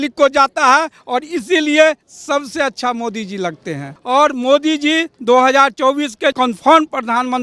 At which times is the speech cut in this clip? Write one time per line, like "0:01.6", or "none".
0:03.9
0:06.3